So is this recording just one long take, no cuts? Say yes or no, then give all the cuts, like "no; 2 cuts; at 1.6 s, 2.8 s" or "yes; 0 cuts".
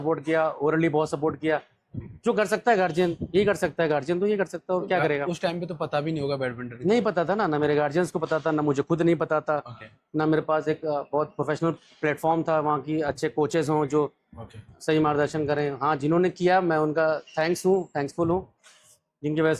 yes; 0 cuts